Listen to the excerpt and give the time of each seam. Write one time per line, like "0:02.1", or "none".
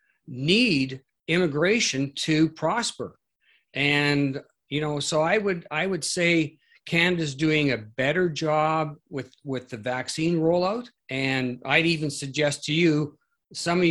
0:11.0

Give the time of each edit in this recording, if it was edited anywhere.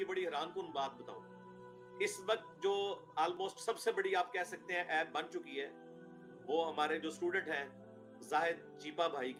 none

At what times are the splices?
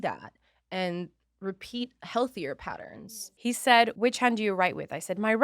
0:03.0
0:03.9

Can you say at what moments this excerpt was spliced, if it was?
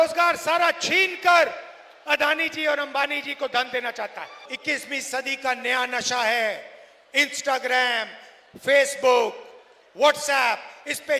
0:04.5

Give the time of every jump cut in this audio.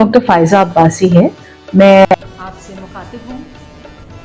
0:02.0

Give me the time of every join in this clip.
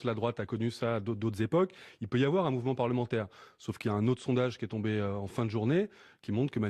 none

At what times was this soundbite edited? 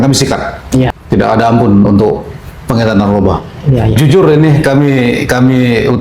0:00.9
0:04.0

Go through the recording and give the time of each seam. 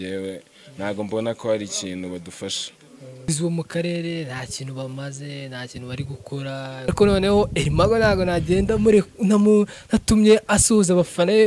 0:03.2
0:06.9

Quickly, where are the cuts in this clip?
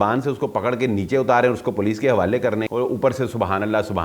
0:02.7

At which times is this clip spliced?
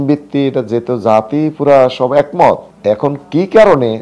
0:02.7

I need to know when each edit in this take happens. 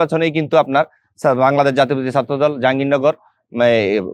none

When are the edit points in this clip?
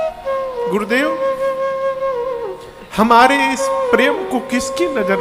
none

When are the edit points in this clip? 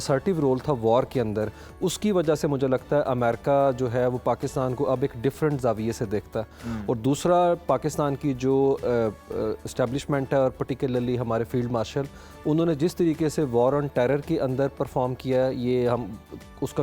none

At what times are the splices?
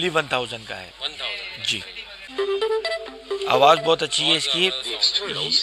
none

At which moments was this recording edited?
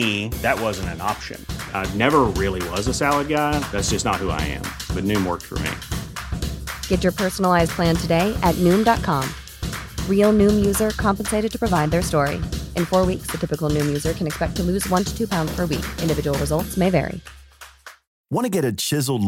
none

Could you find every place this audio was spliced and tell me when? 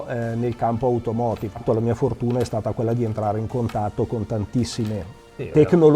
0:01.6

